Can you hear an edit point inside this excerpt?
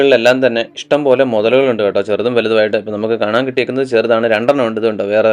no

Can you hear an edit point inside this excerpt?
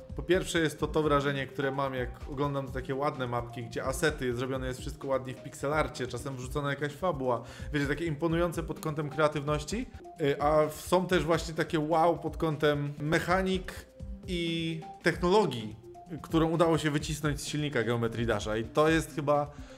yes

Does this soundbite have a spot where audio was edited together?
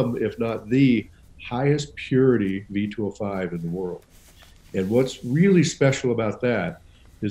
no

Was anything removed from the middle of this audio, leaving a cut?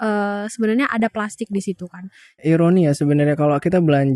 yes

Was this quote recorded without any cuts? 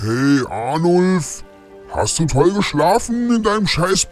yes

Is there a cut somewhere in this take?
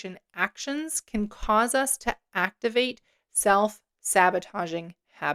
no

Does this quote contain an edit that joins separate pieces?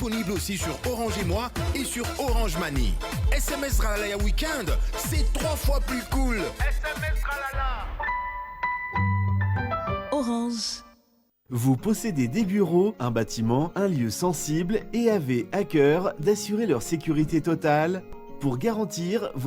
yes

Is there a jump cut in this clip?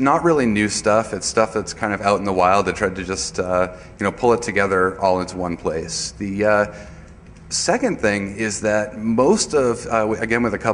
no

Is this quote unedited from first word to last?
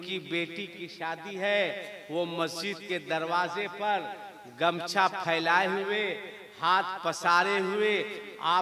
yes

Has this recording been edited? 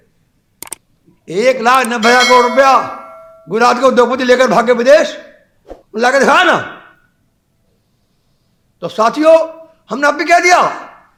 no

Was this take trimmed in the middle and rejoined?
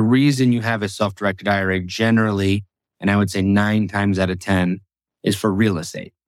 no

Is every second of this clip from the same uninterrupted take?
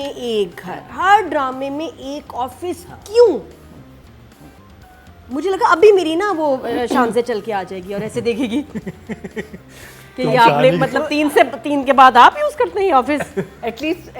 yes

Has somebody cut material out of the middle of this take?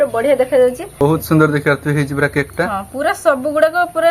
yes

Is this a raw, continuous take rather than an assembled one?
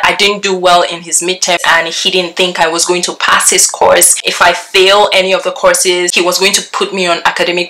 no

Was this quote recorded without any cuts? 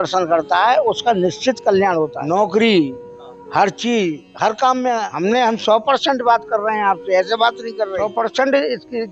no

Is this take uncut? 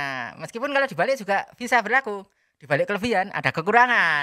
yes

